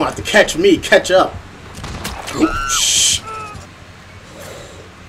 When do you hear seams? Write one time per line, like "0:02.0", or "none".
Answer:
0:03.6

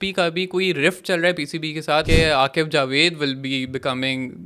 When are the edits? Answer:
0:02.1

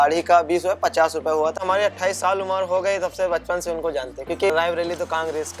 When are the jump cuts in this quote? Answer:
0:01.6
0:04.5

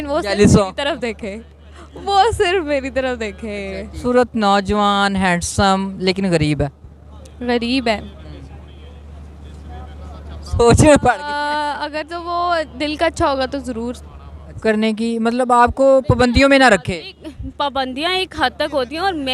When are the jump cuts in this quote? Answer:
0:04.0
0:14.6

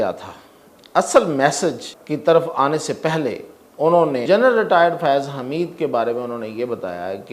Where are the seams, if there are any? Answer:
0:01.9
0:04.2

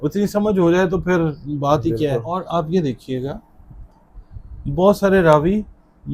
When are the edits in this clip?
0:02.4

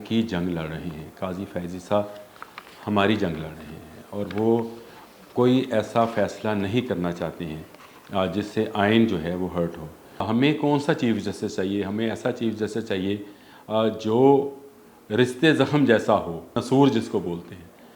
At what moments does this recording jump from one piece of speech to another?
0:10.2
0:16.6

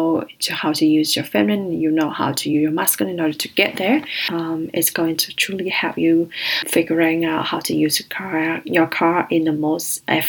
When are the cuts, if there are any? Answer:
0:04.2
0:06.6

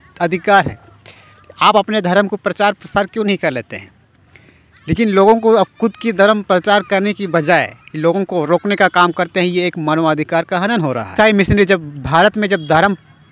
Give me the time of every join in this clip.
0:11.1

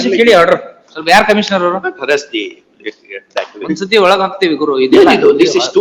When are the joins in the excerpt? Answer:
none

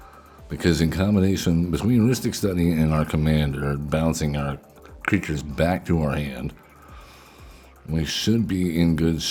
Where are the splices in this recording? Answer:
none

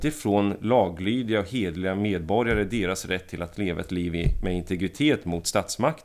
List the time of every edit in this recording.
none

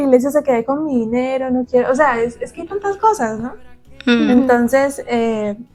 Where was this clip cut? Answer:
none

